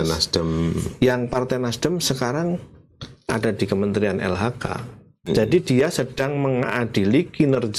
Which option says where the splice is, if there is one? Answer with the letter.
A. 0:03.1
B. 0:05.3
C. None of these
B